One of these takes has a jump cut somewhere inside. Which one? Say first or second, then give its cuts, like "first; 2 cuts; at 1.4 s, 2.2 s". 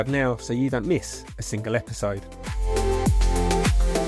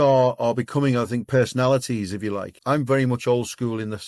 second; 2 cuts; at 1.3 s, 2.5 s